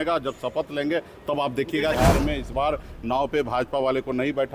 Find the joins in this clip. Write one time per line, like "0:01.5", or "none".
0:02.0